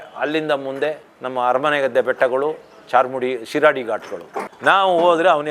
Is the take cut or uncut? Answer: cut